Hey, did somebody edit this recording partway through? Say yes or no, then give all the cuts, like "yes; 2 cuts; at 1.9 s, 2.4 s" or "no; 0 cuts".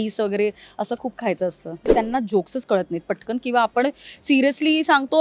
yes; 1 cut; at 1.9 s